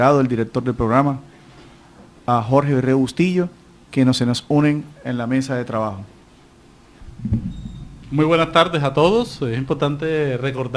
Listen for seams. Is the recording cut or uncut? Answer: cut